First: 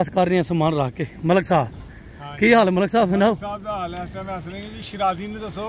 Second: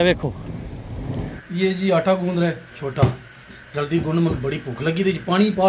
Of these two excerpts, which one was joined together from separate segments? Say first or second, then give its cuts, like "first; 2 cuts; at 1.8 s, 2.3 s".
second; 1 cut; at 1.3 s